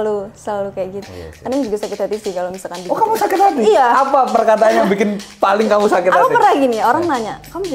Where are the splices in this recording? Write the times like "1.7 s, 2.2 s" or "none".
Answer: 1.0 s